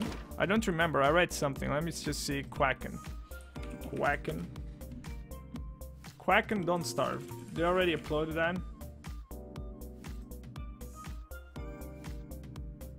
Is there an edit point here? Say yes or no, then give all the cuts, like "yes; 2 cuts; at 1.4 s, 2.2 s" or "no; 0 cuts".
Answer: no; 0 cuts